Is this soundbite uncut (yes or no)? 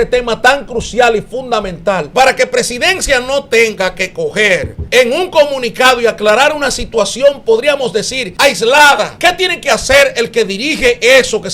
no